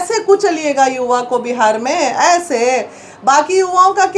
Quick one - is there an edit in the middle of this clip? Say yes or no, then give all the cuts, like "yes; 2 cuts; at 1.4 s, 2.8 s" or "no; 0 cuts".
no; 0 cuts